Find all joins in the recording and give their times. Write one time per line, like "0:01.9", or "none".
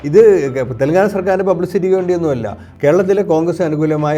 0:02.6

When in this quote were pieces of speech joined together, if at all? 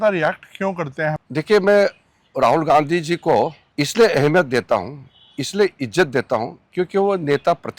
0:01.2
0:03.6

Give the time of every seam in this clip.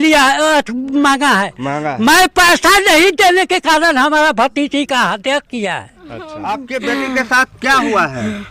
0:06.3

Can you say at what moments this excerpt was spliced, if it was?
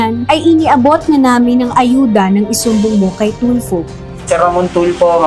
0:04.2

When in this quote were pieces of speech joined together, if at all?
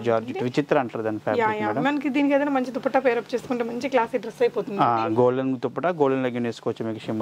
none

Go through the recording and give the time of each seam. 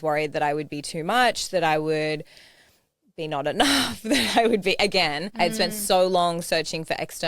0:05.2

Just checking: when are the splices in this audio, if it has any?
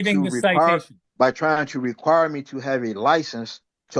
0:01.0

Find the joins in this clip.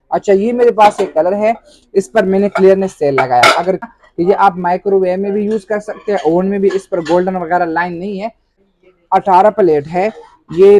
0:03.9
0:08.6

